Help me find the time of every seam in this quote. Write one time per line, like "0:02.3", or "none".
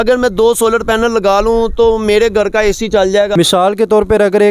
0:03.3